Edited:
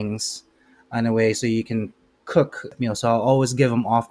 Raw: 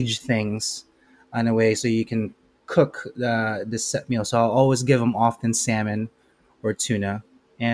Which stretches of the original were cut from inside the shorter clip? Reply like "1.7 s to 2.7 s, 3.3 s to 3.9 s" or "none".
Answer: 3.2 s to 4.0 s